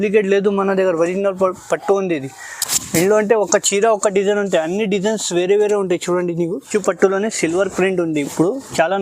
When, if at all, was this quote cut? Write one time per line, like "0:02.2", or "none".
0:06.7